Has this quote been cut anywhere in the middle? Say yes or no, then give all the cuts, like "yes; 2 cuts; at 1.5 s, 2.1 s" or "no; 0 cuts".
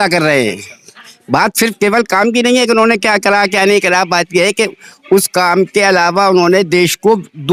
no; 0 cuts